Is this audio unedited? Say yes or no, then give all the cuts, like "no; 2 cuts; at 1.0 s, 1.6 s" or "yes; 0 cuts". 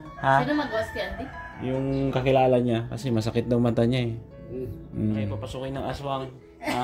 no; 1 cut; at 5.5 s